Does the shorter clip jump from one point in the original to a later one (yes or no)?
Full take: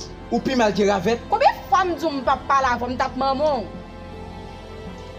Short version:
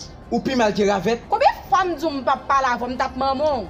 no